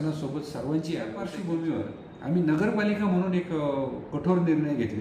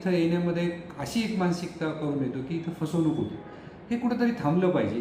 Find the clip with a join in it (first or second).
first